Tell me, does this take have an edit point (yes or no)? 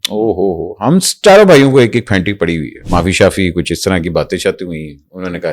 yes